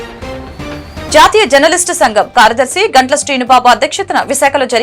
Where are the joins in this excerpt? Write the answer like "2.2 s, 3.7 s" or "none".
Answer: 1.1 s